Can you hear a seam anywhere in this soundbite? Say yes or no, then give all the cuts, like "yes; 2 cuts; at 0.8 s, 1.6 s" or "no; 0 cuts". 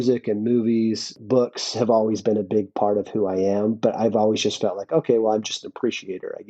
yes; 1 cut; at 1.2 s